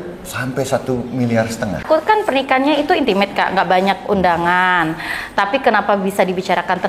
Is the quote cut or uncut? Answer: cut